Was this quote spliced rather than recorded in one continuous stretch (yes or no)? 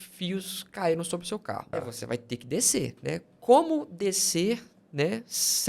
yes